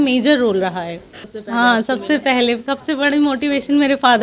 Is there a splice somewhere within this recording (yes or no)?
yes